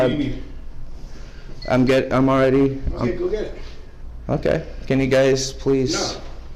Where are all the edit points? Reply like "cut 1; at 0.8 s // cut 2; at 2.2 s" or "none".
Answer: none